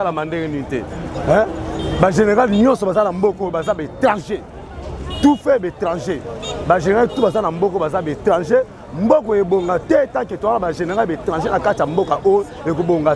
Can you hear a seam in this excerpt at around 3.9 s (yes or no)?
no